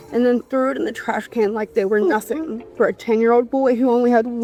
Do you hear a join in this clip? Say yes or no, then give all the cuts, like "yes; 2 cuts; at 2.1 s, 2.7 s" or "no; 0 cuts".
no; 0 cuts